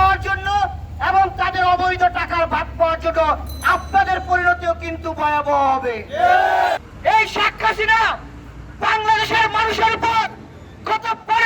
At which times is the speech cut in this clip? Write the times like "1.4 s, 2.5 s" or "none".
6.8 s

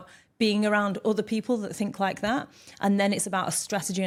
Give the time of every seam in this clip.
none

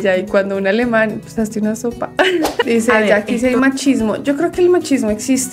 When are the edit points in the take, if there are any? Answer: 2.6 s

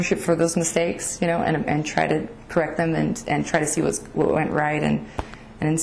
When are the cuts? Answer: none

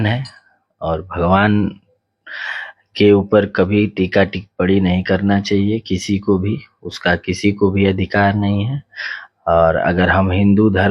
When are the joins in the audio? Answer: none

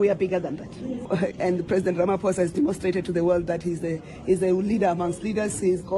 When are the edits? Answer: 1.1 s

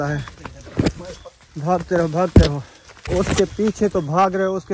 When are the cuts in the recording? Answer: 3.1 s

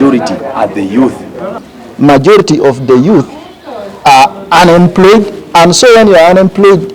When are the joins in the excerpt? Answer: 1.8 s

